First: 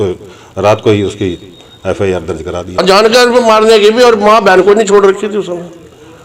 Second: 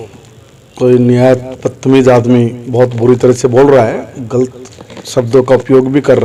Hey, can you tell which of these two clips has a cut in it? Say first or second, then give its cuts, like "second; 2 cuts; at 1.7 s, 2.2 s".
first; 1 cut; at 2.8 s